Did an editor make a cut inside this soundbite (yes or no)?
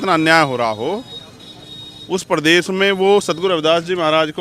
no